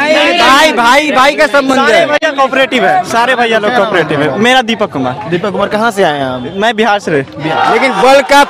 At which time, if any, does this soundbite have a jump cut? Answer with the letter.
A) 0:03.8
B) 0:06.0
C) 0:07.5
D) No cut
C